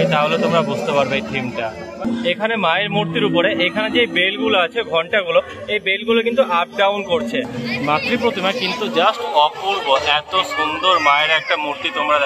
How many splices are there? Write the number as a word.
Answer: two